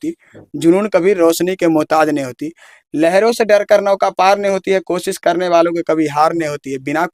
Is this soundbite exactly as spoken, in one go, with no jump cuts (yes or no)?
yes